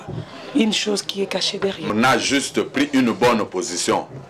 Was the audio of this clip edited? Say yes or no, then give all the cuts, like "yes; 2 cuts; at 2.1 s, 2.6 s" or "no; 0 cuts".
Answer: yes; 1 cut; at 1.9 s